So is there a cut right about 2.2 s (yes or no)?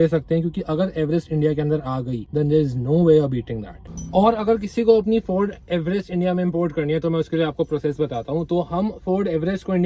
no